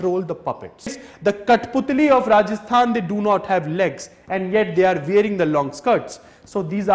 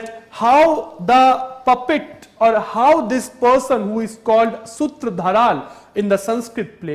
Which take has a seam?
first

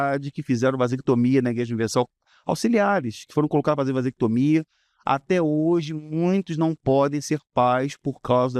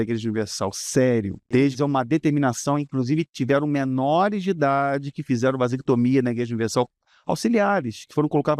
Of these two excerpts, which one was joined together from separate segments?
second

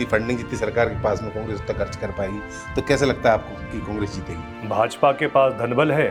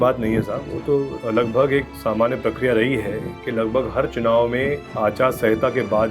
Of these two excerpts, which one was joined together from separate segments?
second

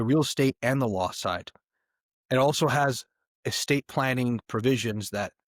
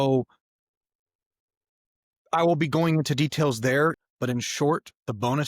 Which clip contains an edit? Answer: second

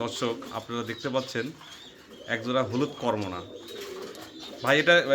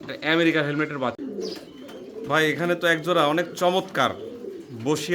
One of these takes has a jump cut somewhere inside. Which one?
second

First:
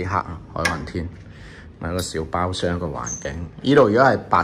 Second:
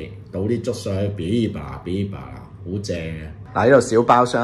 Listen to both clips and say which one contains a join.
second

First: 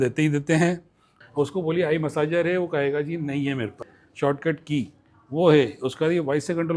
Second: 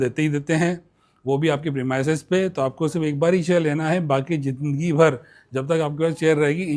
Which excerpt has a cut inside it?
first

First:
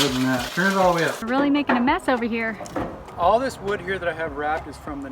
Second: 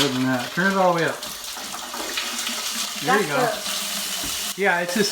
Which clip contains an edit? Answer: first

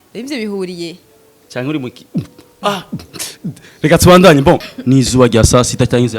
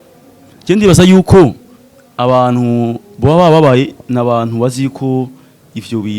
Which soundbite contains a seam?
first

